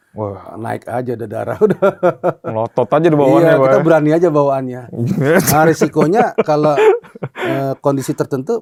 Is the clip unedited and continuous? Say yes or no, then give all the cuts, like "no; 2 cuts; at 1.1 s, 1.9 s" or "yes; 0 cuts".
yes; 0 cuts